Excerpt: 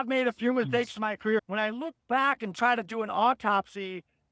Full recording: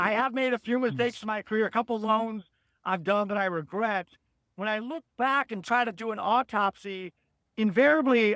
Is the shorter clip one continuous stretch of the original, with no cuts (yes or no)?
no